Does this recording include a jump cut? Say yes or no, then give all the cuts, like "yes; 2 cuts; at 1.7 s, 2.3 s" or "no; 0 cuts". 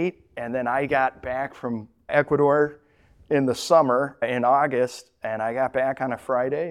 no; 0 cuts